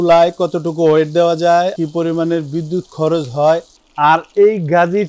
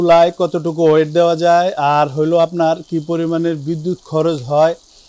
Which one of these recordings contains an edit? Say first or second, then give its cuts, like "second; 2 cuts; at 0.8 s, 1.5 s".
first; 2 cuts; at 1.7 s, 3.8 s